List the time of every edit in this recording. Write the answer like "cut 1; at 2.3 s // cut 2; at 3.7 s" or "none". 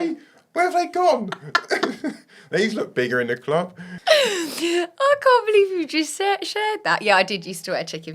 cut 1; at 3.8 s